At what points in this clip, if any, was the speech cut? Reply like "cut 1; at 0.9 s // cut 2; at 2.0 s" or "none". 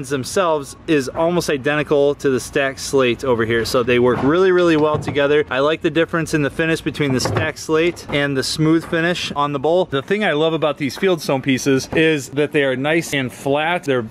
cut 1; at 9.9 s

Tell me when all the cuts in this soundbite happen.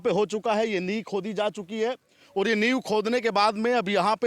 none

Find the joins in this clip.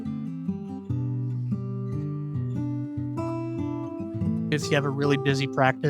cut 1; at 4.6 s

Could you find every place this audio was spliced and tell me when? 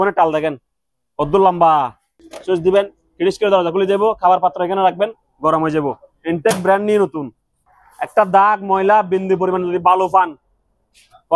cut 1; at 2.2 s // cut 2; at 7.6 s

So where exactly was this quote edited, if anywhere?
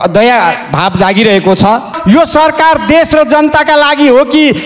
cut 1; at 1.9 s

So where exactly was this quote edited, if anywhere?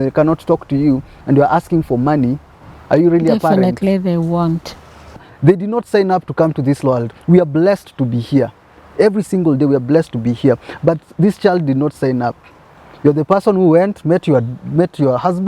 cut 1; at 5.3 s

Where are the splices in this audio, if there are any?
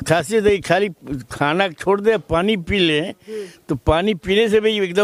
none

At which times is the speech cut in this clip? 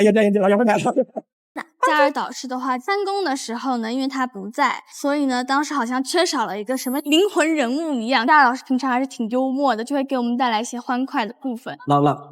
cut 1; at 1.6 s

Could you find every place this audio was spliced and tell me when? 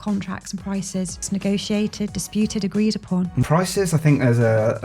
cut 1; at 1.2 s // cut 2; at 3.4 s

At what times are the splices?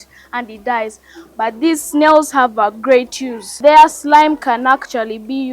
cut 1; at 3.5 s

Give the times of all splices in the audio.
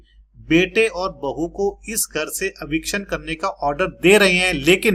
none

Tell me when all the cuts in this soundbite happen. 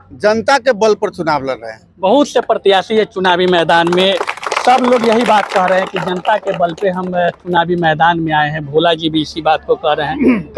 none

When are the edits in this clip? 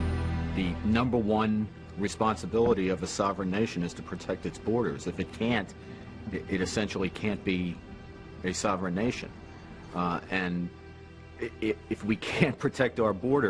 cut 1; at 8.3 s

